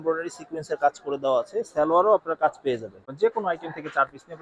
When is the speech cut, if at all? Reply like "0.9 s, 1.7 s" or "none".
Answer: 3.1 s